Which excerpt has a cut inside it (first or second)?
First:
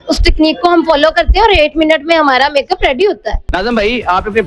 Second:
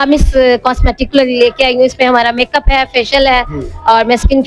first